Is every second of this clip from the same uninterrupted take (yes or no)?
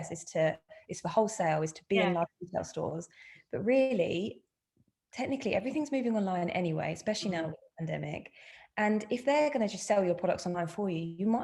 yes